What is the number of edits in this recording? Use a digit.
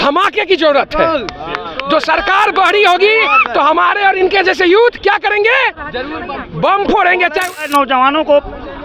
1